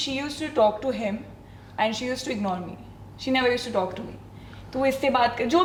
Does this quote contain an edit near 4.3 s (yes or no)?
no